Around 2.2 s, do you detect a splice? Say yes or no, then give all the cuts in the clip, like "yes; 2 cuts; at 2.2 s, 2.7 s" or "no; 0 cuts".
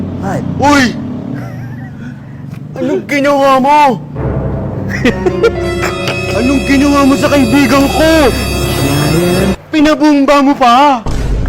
no; 1 cut; at 9.6 s